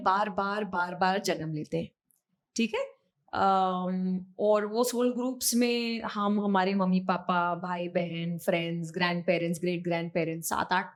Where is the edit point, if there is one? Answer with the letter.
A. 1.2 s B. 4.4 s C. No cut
C